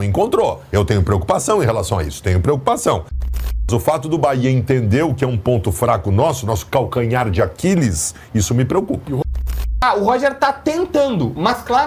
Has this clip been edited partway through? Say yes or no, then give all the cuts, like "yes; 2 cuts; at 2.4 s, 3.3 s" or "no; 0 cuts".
yes; 2 cuts; at 3.3 s, 9.2 s